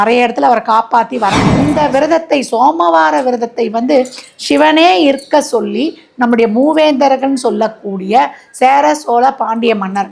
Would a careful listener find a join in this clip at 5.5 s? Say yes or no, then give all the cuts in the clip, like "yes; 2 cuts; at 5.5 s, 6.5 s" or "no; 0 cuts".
no; 1 cut; at 1.6 s